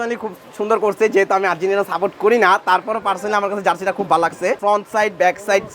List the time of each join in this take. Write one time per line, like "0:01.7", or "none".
0:04.6